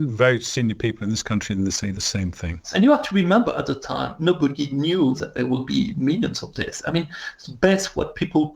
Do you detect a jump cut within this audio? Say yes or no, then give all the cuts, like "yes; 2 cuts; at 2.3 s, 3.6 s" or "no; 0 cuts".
yes; 2 cuts; at 2.7 s, 5.3 s